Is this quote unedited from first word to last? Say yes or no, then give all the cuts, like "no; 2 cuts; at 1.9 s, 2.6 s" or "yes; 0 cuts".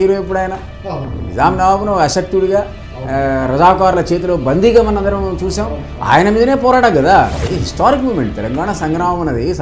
no; 1 cut; at 7.4 s